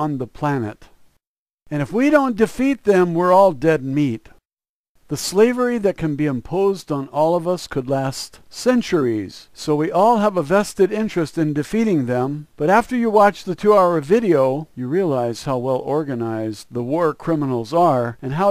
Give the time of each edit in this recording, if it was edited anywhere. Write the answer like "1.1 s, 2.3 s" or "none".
14.0 s